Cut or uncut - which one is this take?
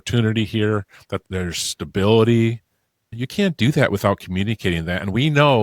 cut